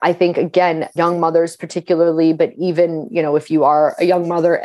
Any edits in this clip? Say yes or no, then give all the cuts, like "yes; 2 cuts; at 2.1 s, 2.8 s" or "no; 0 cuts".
yes; 1 cut; at 0.9 s